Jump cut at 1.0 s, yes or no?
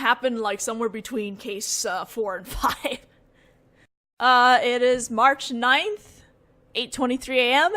yes